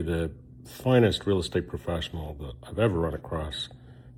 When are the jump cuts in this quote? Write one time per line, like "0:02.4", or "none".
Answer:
none